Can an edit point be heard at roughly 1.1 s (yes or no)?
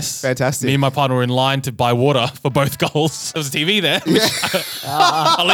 no